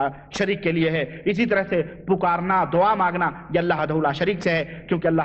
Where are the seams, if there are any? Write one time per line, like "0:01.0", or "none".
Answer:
0:03.8

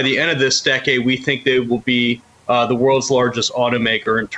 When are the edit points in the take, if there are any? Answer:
0:02.3

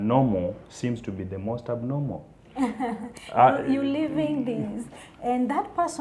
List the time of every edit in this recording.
none

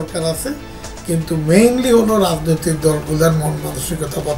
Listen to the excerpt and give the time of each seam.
none

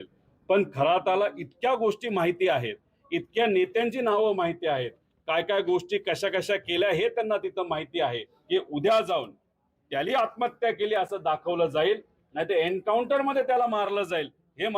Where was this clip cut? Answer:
0:01.4

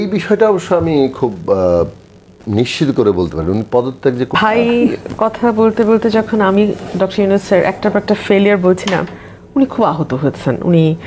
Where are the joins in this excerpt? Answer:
0:04.3

